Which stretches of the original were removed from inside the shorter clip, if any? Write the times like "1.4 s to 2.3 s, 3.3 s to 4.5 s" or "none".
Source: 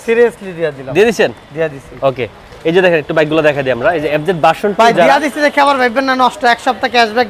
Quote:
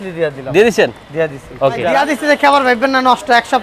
2.3 s to 5.0 s